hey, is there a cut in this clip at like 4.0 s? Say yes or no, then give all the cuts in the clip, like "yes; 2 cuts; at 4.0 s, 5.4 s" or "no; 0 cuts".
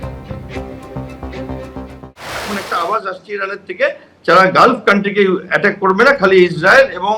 no; 1 cut; at 2.1 s